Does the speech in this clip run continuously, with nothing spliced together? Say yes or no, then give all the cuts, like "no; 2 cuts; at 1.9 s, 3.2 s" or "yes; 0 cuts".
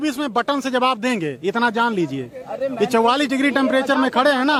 yes; 0 cuts